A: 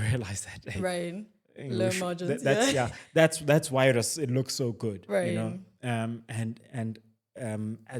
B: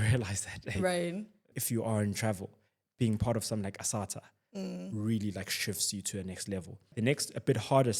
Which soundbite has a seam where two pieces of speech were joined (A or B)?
B